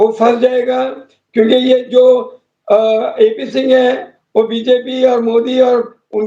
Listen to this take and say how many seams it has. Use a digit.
0